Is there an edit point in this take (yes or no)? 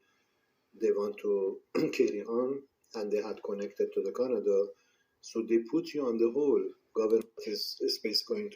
yes